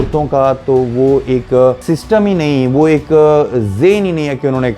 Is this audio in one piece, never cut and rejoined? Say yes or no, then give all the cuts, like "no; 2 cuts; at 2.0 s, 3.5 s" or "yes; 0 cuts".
no; 1 cut; at 1.8 s